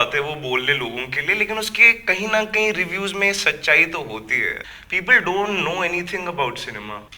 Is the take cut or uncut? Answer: cut